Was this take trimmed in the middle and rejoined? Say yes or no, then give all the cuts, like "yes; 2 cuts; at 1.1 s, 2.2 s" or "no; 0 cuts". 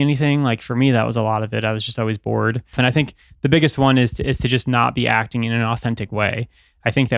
yes; 1 cut; at 2.8 s